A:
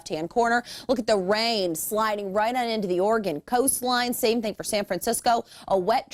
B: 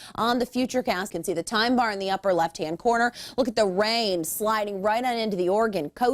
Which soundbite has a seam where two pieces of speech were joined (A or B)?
B